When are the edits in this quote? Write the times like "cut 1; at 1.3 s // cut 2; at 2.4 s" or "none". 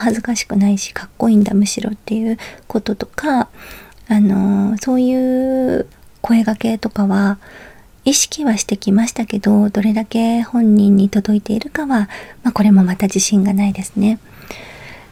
none